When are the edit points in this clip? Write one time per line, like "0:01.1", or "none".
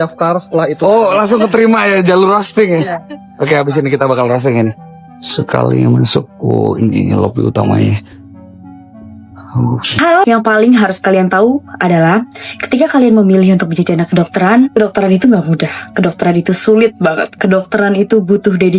0:09.9